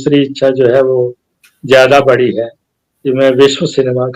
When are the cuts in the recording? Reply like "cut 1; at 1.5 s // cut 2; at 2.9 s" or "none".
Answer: none